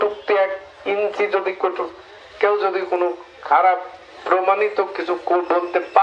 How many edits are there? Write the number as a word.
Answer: zero